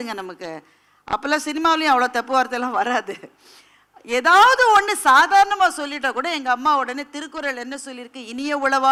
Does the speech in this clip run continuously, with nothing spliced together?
yes; 0 cuts

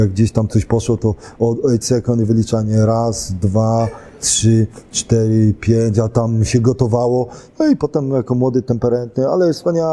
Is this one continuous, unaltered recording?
yes; 0 cuts

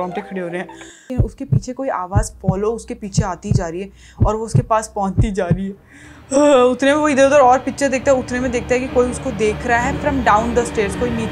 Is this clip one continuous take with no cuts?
no; 1 cut; at 1.1 s

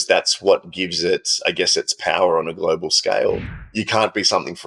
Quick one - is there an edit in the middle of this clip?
yes; 1 cut; at 3.5 s

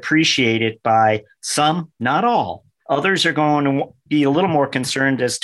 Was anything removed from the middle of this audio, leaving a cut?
no; 0 cuts

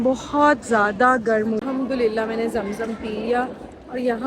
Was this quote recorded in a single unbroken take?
no; 1 cut; at 1.6 s

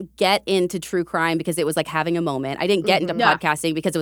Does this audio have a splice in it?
no; 0 cuts

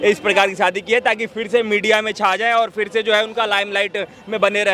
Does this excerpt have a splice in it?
no; 0 cuts

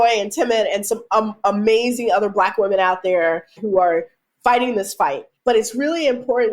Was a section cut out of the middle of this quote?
yes; 2 cuts; at 3.6 s, 5.3 s

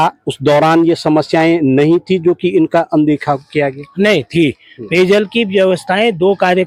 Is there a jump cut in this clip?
no; 0 cuts

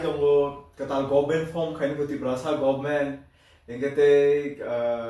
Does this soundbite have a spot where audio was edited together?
no; 0 cuts

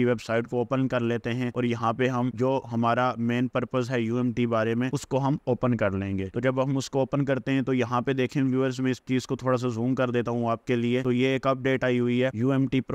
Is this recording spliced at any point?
no; 0 cuts

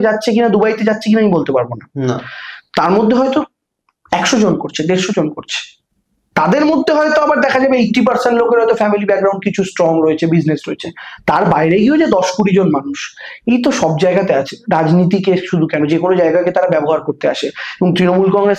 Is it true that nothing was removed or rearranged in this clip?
yes; 0 cuts

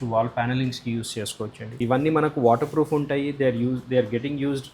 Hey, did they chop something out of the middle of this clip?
yes; 1 cut; at 1.7 s

